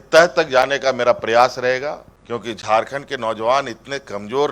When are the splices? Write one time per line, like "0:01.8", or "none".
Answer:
0:02.1

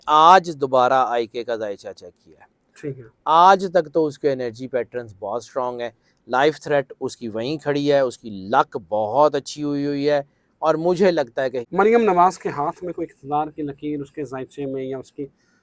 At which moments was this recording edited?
0:11.6

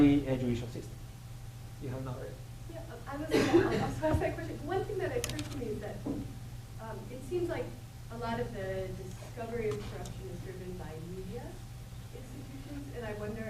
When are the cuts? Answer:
0:03.7

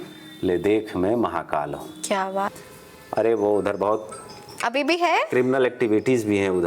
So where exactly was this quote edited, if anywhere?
0:02.5

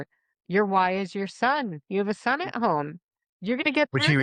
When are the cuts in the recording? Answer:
none

